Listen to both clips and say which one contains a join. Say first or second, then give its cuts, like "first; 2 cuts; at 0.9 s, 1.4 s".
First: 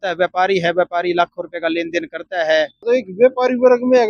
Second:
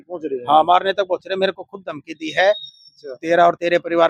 first; 1 cut; at 2.8 s